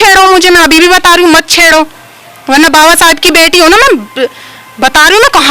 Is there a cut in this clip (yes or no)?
no